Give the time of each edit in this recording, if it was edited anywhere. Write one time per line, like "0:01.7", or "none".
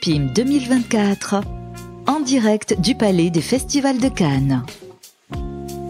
0:04.8